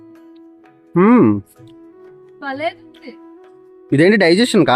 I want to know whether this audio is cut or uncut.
cut